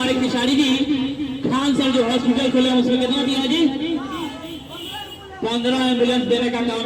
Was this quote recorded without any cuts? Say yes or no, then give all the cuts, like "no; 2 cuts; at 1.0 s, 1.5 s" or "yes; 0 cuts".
yes; 0 cuts